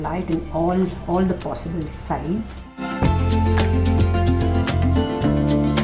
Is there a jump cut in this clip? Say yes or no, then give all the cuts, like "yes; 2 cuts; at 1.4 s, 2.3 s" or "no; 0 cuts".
no; 0 cuts